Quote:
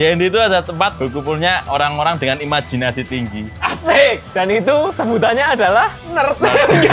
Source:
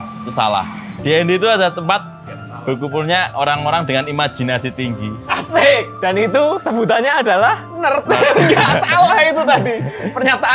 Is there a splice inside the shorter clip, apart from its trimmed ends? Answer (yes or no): yes